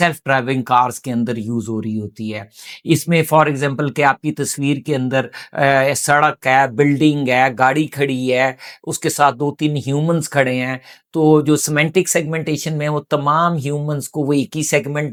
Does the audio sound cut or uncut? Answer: uncut